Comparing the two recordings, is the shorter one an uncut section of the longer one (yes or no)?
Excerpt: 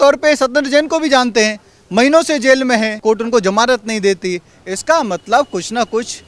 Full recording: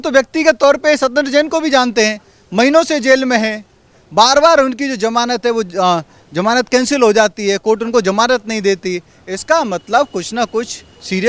no